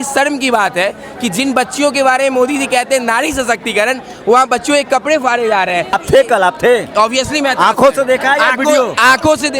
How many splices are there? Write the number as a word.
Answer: one